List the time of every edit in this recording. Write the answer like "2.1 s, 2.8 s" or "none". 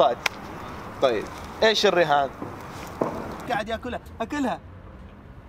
3.3 s